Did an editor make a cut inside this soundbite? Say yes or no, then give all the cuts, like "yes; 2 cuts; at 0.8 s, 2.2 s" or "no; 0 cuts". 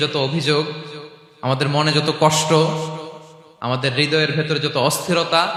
no; 0 cuts